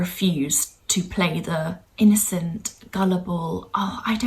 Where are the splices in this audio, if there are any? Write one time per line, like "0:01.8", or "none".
0:01.8